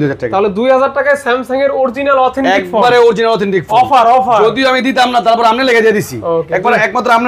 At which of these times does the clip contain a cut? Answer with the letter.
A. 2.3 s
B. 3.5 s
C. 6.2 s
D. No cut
D